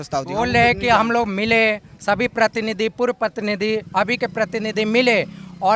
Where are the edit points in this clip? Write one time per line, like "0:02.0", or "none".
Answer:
none